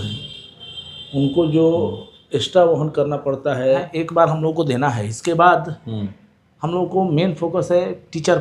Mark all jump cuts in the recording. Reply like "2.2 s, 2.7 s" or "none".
3.9 s